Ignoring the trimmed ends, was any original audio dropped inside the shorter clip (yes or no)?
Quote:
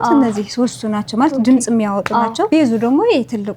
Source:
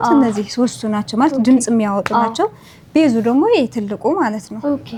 yes